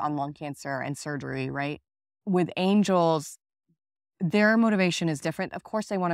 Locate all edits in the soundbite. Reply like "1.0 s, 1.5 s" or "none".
2.1 s